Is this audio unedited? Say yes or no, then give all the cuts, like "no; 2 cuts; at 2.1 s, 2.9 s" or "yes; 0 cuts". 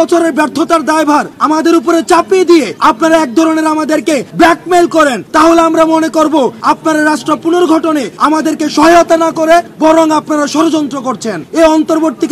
no; 8 cuts; at 1.3 s, 2.7 s, 4.3 s, 5.2 s, 6.6 s, 8.1 s, 9.7 s, 11.4 s